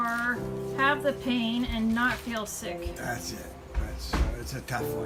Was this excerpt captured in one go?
yes; 0 cuts

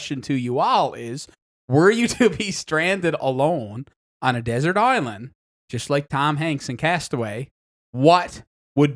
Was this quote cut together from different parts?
no; 0 cuts

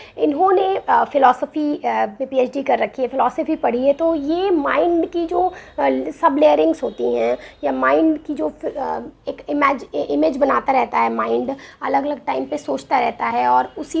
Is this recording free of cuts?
yes; 0 cuts

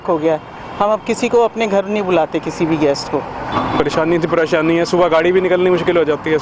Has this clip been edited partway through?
yes; 1 cut; at 3.4 s

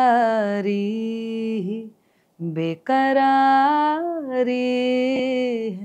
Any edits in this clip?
no; 0 cuts

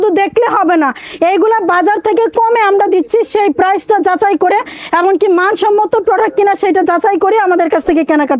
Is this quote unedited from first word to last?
yes; 0 cuts

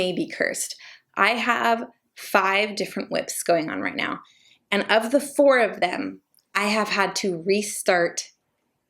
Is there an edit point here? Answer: yes; 1 cut; at 1.0 s

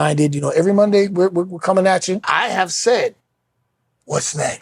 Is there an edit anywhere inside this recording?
yes; 1 cut; at 2.3 s

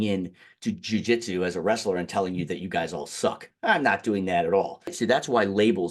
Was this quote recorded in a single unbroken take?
no; 1 cut; at 4.9 s

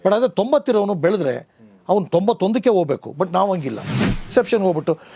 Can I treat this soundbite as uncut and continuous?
no; 1 cut; at 4.2 s

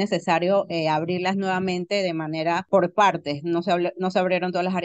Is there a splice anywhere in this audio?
yes; 1 cut; at 2.6 s

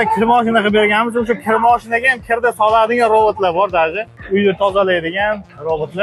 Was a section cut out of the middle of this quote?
no; 0 cuts

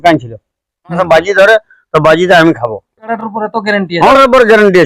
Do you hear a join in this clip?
yes; 3 cuts; at 1.0 s, 3.0 s, 4.1 s

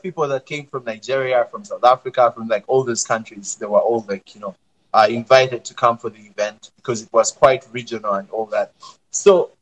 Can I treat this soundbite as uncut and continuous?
yes; 0 cuts

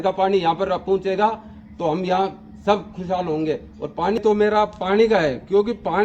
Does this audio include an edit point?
yes; 1 cut; at 4.2 s

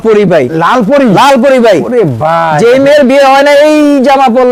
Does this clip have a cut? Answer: no; 0 cuts

